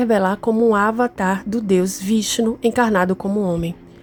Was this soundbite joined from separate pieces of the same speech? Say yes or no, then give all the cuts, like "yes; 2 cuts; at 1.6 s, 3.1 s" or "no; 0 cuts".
no; 0 cuts